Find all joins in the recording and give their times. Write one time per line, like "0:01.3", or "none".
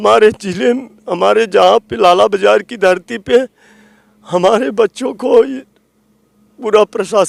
none